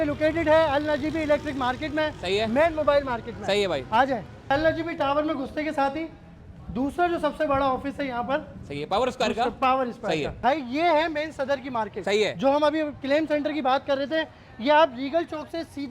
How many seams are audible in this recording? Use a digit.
2